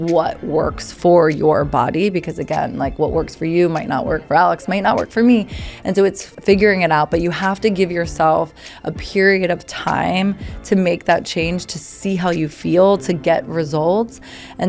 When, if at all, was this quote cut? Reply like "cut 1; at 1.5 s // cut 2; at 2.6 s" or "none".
cut 1; at 6.2 s